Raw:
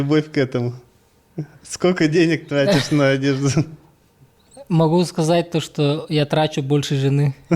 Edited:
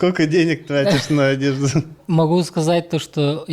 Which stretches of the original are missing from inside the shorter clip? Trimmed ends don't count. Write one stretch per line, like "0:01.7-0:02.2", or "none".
0:03.8-0:04.6